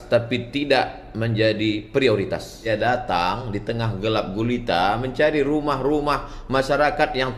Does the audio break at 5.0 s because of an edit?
no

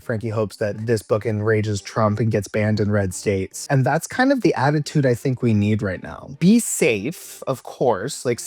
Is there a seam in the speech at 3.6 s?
yes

